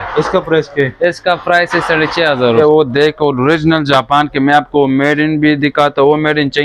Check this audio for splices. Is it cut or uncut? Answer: cut